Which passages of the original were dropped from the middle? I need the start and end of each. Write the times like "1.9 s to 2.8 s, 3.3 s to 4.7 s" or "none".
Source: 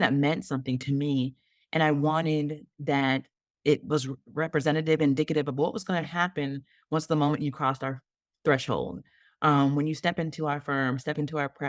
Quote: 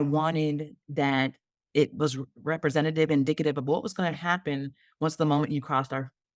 none